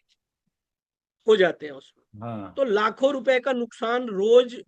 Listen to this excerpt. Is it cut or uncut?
uncut